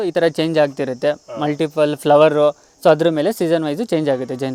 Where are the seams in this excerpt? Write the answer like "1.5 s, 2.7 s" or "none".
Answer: none